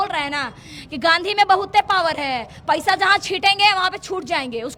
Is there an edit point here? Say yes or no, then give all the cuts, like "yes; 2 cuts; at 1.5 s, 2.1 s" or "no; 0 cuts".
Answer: no; 0 cuts